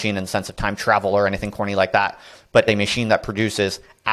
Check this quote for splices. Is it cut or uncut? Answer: cut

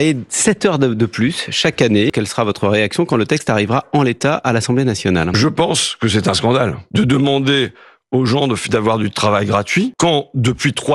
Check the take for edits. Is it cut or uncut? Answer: cut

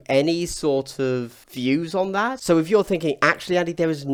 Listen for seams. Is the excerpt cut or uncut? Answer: uncut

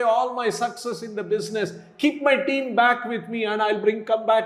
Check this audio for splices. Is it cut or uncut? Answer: uncut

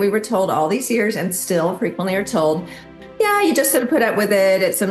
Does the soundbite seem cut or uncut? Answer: cut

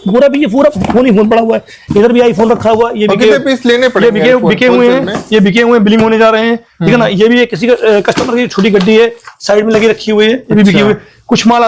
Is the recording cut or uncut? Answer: uncut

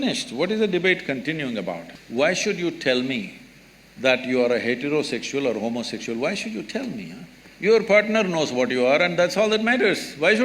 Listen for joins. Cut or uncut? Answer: cut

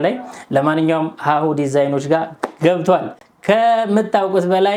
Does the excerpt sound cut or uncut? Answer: uncut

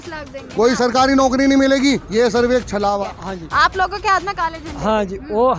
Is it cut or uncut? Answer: cut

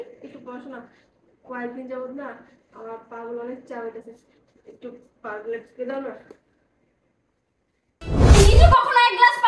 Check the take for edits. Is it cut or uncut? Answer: cut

